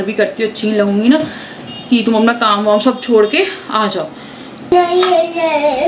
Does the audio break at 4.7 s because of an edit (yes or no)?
yes